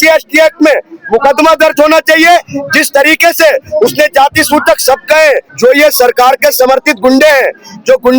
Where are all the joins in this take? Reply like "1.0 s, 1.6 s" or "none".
5.5 s